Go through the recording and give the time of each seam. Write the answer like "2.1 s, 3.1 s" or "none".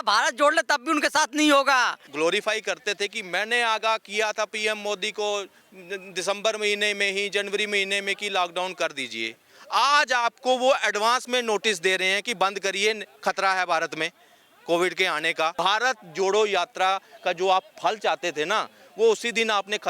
2.0 s, 15.5 s